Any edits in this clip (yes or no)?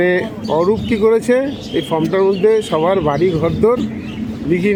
no